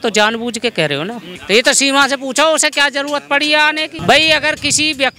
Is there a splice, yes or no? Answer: yes